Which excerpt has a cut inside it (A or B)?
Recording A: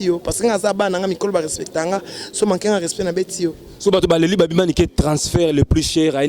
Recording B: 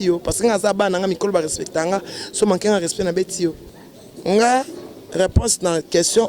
B